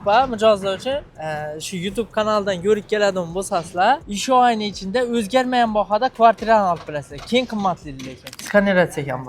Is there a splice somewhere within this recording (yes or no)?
yes